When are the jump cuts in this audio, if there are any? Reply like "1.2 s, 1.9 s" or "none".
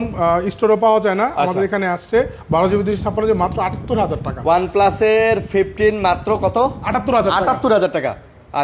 none

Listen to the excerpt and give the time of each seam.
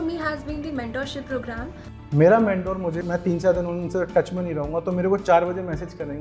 3.0 s

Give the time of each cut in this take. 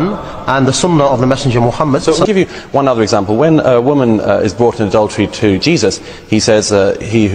2.2 s

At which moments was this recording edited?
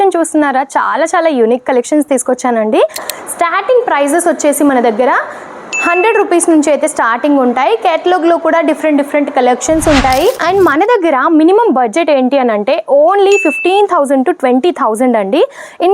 3.1 s, 10.4 s

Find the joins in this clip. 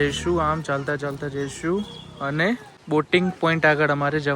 2.7 s

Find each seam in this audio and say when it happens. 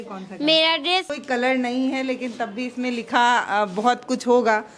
1.2 s

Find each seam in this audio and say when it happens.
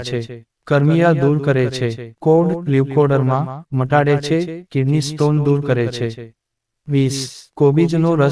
none

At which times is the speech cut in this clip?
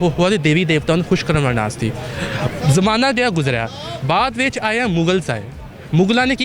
none

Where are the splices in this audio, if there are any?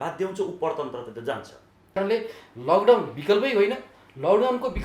2.0 s

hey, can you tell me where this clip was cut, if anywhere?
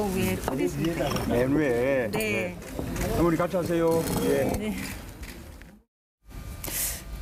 none

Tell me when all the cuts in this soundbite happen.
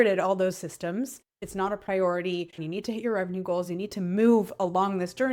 1.4 s, 2.6 s

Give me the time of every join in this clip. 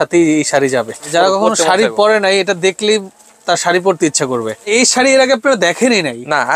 1.0 s, 4.6 s

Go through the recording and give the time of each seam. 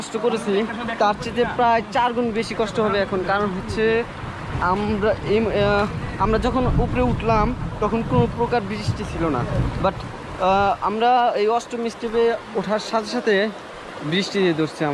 none

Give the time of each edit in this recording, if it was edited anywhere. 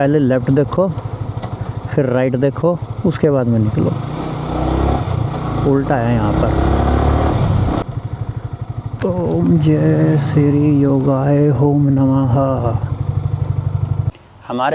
none

